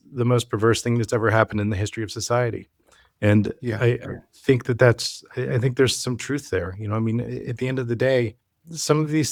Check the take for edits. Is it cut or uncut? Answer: uncut